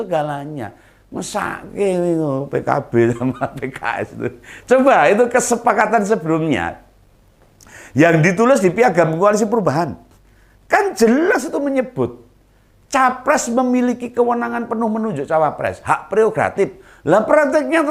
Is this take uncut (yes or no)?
yes